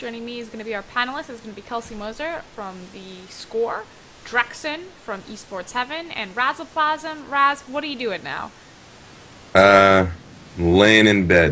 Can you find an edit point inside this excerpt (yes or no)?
no